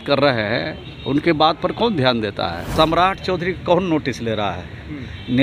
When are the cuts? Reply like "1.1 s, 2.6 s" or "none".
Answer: 2.6 s